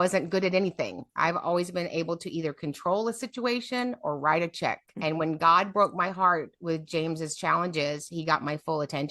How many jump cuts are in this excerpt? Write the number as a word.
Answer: one